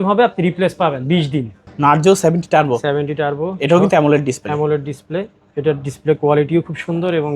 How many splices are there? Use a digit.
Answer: 1